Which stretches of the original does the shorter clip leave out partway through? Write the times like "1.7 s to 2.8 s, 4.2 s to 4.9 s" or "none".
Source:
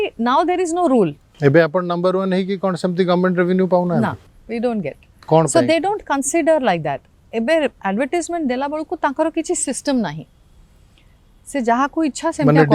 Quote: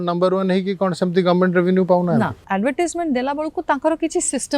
4.3 s to 7.8 s